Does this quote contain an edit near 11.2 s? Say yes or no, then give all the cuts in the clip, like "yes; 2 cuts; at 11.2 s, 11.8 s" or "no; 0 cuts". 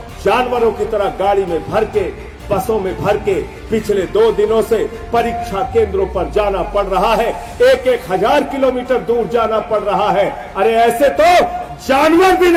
no; 0 cuts